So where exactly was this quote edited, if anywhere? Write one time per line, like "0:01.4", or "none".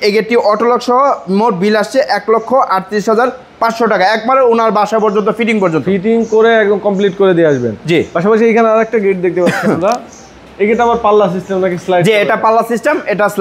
none